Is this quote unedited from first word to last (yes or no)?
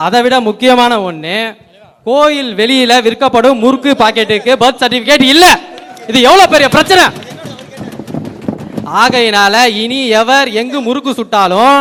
yes